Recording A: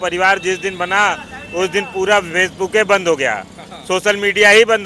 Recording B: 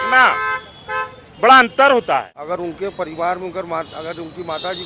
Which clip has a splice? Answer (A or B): B